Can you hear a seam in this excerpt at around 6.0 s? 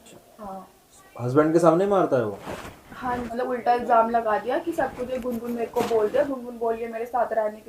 no; 1 cut; at 3.3 s

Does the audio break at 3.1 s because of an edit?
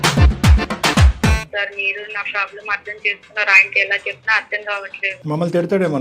no; 2 cuts; at 1.5 s, 5.1 s

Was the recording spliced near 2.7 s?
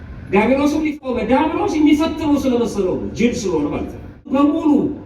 no; 2 cuts; at 1.0 s, 4.3 s

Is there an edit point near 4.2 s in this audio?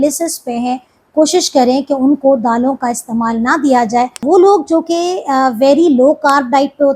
yes; 1 cut; at 4.2 s

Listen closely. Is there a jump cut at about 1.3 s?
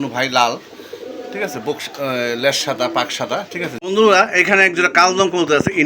no; 1 cut; at 3.8 s

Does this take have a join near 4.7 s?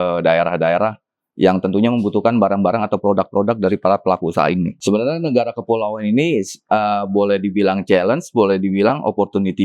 yes; 1 cut; at 4.7 s

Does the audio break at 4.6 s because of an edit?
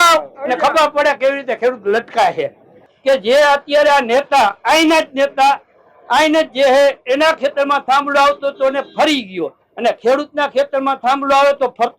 no; 1 cut; at 2.8 s

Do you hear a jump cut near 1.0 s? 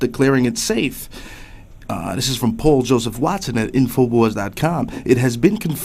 no; 0 cuts

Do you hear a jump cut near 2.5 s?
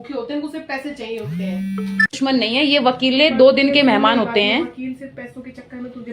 yes; 1 cut; at 2.5 s

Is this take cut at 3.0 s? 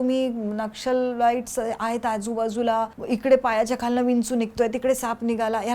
yes; 1 cut; at 3.0 s

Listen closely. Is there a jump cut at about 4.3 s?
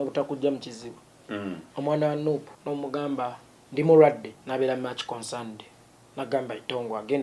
yes; 3 cuts; at 1.2 s, 2.5 s, 4.3 s

